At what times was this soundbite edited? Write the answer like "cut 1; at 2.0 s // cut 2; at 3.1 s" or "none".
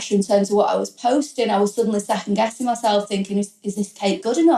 none